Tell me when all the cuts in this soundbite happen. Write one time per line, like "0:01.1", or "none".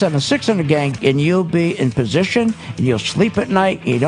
0:00.9